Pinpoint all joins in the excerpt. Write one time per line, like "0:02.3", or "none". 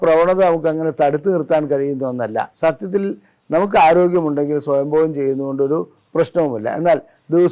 0:02.5

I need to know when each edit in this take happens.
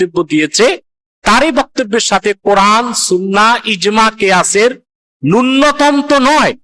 none

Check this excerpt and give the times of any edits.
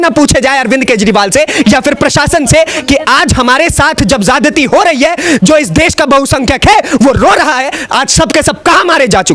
none

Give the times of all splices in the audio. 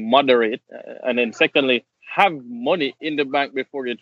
0:02.0

